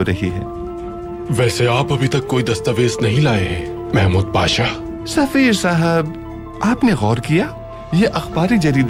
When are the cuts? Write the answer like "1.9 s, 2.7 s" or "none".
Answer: none